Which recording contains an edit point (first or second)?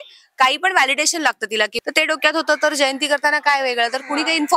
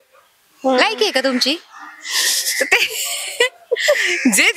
first